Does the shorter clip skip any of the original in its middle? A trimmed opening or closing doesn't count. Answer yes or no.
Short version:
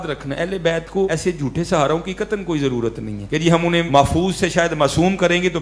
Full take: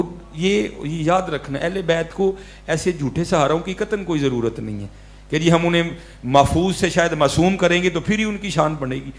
yes